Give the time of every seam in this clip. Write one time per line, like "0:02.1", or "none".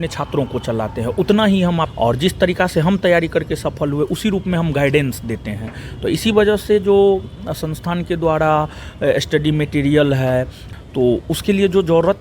0:01.9
0:10.6